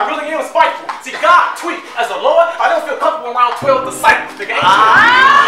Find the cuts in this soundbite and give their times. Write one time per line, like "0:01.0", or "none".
none